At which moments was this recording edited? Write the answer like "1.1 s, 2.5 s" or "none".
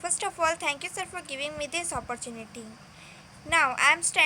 none